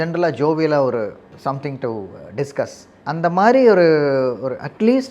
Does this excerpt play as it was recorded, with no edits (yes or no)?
no